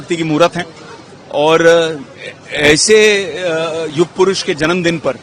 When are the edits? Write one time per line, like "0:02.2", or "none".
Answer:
none